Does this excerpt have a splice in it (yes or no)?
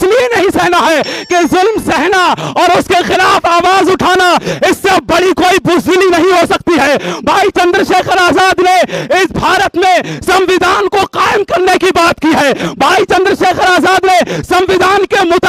no